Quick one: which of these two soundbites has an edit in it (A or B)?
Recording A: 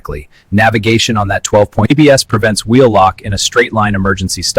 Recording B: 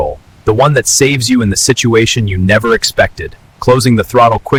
A